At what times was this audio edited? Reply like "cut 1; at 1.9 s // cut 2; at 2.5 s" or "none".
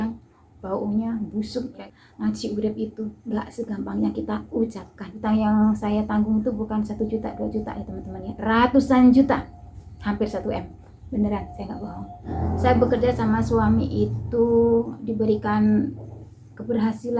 cut 1; at 1.8 s // cut 2; at 5.1 s // cut 3; at 12.3 s